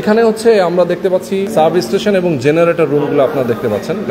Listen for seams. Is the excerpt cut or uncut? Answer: cut